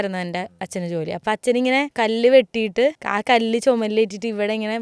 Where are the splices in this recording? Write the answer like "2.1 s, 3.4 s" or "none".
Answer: 1.2 s, 1.9 s, 3.1 s